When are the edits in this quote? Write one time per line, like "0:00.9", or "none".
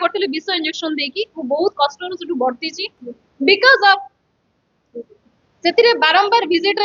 none